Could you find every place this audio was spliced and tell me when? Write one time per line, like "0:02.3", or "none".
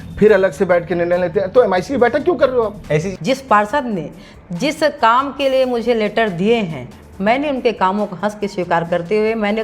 0:03.1